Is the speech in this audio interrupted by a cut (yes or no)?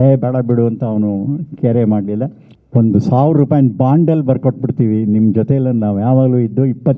yes